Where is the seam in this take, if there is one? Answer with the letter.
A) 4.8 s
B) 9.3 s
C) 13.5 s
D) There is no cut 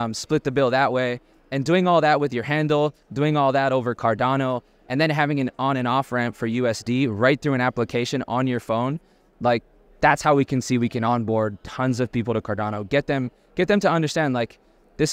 D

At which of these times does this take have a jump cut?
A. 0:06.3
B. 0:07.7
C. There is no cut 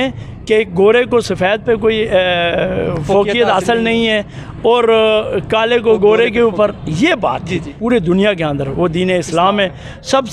B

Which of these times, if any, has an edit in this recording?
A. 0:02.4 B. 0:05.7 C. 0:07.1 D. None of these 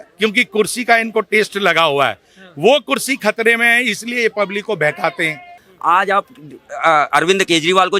B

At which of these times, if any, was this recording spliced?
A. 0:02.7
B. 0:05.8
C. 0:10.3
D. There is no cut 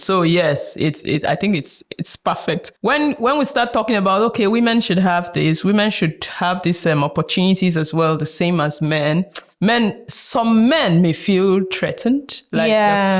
A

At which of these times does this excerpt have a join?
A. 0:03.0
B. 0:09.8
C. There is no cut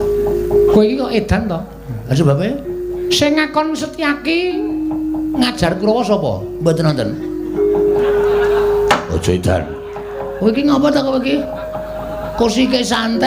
A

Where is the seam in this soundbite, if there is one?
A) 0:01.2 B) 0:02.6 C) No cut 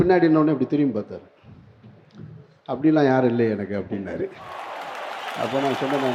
C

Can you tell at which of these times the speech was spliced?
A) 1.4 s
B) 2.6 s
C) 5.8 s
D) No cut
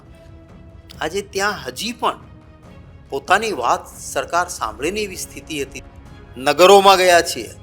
C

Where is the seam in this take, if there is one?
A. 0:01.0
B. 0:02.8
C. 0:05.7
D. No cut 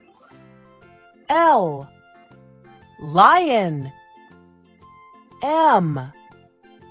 A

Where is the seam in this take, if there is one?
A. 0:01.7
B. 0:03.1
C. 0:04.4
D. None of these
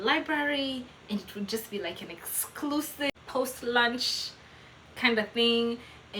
B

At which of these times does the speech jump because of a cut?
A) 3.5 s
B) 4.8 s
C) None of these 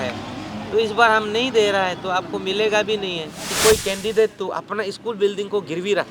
A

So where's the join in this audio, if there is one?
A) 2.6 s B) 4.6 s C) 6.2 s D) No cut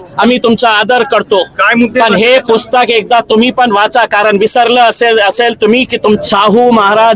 C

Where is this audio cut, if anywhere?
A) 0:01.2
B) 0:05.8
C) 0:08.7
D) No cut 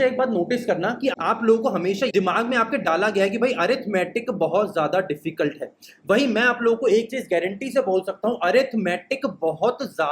A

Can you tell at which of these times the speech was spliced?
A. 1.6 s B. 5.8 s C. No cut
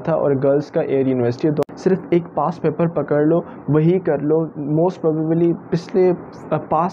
A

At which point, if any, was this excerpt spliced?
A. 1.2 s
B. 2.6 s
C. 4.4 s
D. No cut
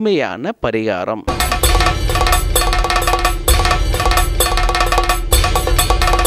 A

